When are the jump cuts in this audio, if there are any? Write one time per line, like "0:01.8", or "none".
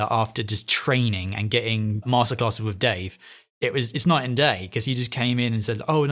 0:02.0